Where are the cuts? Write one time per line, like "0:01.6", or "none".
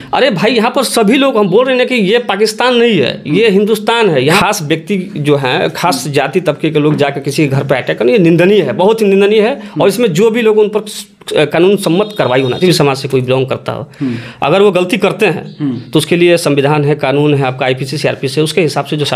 0:04.4
0:12.6